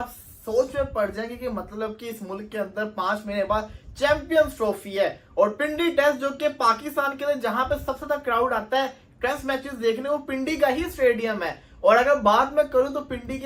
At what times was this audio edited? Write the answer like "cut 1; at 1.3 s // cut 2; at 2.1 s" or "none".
none